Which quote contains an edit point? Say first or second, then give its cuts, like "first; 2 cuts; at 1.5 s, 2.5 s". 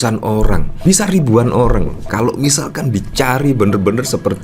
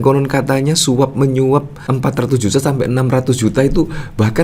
first; 2 cuts; at 0.8 s, 2.1 s